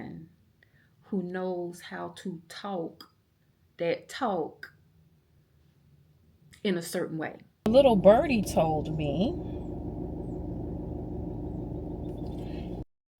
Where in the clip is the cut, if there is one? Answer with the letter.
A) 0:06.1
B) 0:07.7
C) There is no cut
B